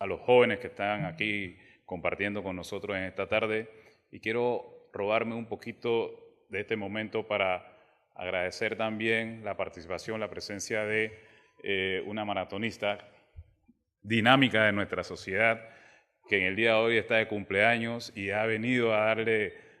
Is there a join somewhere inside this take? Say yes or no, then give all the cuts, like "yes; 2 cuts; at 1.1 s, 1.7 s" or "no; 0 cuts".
no; 0 cuts